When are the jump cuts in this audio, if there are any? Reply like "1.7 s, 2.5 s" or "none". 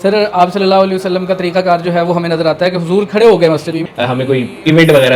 3.8 s